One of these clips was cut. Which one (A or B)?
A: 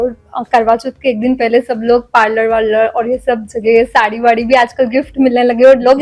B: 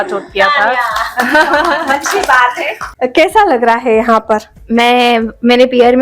B